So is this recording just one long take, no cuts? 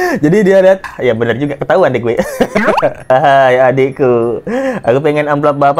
no; 2 cuts; at 0.9 s, 3.1 s

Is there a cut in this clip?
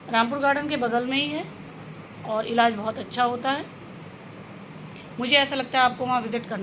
no; 0 cuts

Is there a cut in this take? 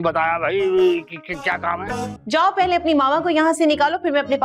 yes; 1 cut; at 2.1 s

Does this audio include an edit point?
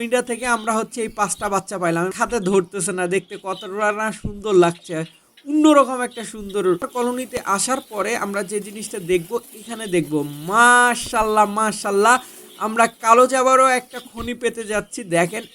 yes; 2 cuts; at 2.1 s, 6.9 s

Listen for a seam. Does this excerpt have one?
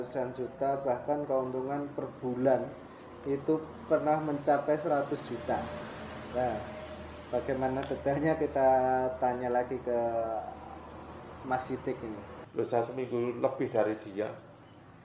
yes; 1 cut; at 12.4 s

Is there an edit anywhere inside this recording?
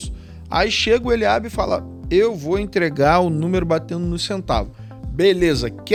no; 0 cuts

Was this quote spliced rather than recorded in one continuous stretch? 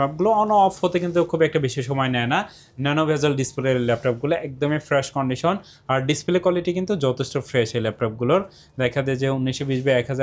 no; 0 cuts

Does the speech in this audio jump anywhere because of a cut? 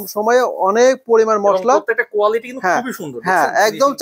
no; 0 cuts

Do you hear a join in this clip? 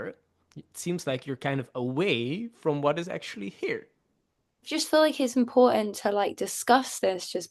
yes; 1 cut; at 4.7 s

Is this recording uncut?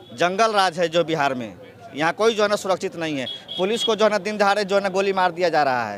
yes; 0 cuts

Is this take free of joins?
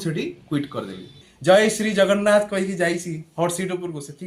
no; 1 cut; at 1.2 s

